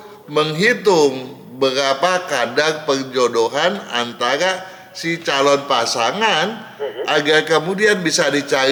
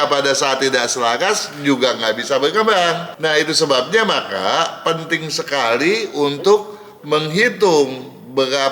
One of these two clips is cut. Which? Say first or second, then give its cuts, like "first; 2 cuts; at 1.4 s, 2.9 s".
second; 1 cut; at 3.1 s